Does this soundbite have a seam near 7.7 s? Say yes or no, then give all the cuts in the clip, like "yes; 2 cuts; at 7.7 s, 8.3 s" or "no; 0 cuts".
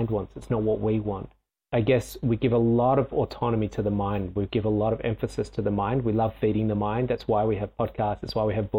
no; 1 cut; at 1.6 s